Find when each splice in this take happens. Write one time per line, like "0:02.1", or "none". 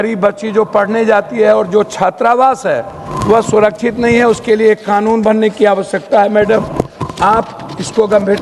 none